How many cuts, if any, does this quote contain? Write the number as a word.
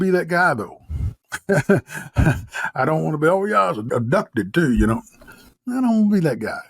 one